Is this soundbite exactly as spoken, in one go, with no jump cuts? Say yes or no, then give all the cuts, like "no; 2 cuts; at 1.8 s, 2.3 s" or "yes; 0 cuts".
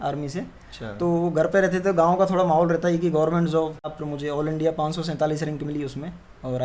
no; 1 cut; at 3.9 s